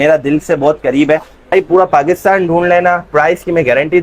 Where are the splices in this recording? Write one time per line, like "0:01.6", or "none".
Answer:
0:01.5